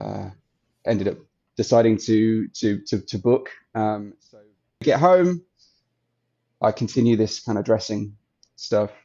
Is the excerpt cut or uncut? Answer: cut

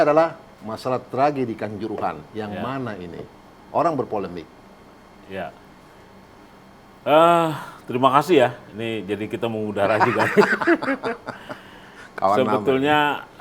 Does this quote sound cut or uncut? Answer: uncut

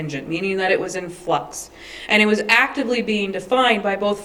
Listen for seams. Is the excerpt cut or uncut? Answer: uncut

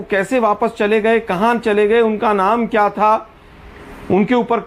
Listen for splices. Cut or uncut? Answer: uncut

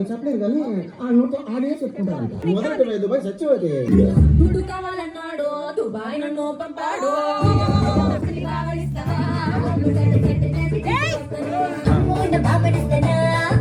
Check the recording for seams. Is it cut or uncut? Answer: cut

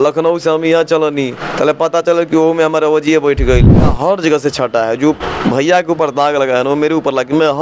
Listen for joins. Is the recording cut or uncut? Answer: cut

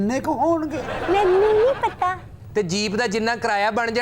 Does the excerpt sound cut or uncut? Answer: cut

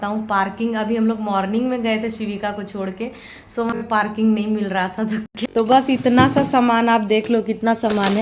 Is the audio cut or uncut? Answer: cut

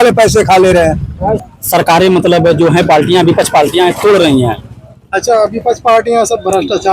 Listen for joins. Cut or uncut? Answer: cut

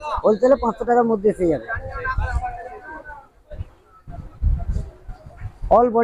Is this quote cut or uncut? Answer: uncut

